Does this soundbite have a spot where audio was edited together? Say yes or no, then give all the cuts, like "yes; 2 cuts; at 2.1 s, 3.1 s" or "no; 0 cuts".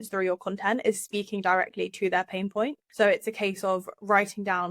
yes; 1 cut; at 2.8 s